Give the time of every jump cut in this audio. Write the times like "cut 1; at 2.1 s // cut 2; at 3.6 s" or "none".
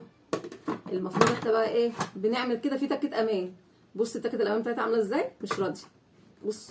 none